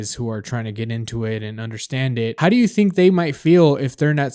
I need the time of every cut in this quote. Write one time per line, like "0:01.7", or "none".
0:02.4